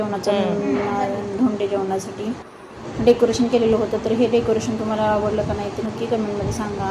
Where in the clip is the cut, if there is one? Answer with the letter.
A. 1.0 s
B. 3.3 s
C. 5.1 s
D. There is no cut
D